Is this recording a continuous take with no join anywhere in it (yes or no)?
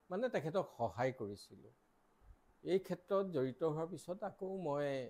yes